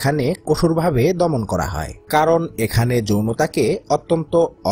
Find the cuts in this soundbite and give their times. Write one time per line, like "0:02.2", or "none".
none